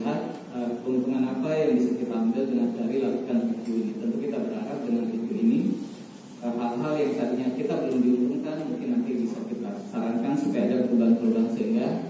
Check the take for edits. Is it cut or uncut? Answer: uncut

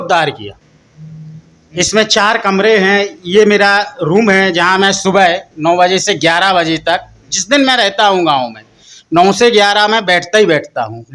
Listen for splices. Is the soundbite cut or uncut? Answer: uncut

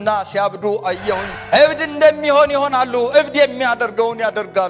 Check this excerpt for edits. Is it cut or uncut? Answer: cut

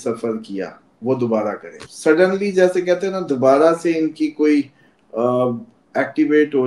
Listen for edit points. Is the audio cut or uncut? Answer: cut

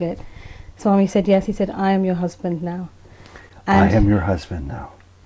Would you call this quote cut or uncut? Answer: uncut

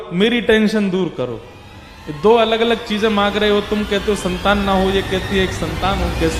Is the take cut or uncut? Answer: uncut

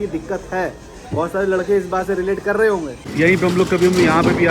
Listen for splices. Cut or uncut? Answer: cut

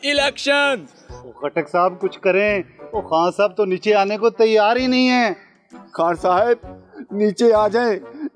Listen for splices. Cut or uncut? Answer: uncut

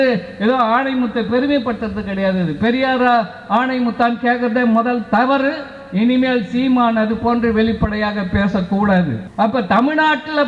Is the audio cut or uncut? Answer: cut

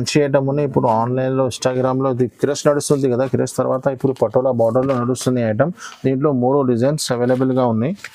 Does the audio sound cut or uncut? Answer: uncut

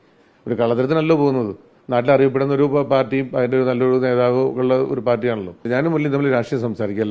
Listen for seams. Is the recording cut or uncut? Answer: cut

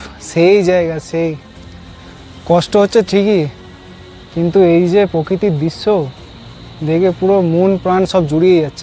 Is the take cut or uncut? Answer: uncut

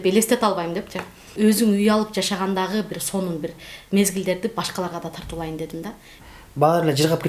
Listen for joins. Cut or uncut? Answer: cut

